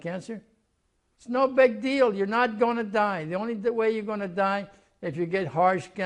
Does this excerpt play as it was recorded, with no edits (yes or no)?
yes